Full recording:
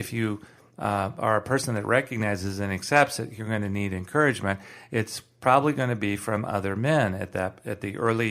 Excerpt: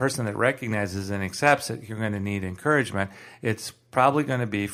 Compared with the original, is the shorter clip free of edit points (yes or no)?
yes